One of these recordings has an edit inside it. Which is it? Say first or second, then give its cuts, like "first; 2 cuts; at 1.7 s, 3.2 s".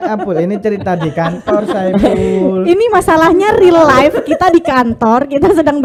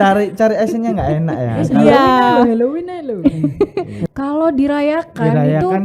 second; 1 cut; at 3.9 s